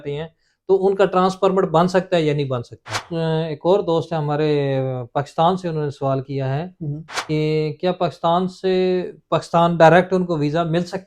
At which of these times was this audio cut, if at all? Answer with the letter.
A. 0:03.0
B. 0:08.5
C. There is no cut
A